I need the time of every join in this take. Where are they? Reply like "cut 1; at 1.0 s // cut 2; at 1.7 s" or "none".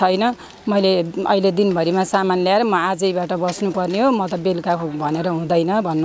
none